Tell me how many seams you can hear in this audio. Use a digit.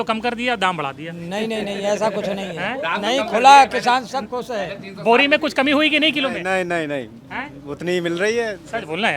0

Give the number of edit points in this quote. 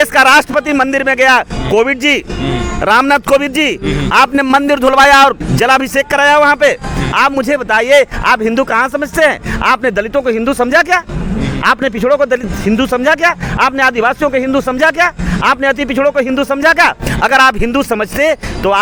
0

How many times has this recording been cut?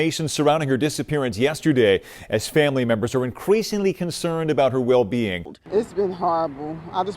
1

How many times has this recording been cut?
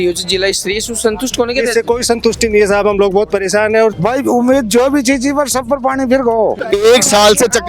2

